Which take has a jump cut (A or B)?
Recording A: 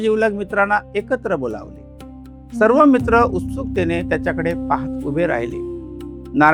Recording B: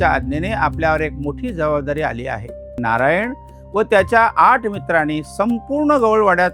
B